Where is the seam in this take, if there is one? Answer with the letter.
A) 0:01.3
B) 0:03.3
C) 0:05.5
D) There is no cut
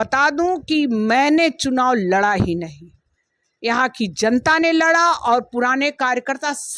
D